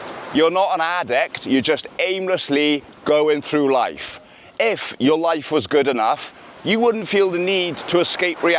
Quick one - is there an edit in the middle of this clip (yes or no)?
no